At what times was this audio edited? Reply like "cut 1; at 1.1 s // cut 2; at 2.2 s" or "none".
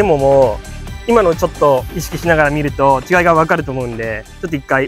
none